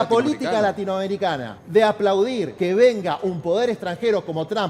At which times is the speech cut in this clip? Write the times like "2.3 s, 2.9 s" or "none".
1.5 s, 2.5 s